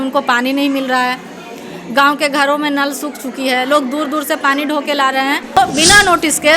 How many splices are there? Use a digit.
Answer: 1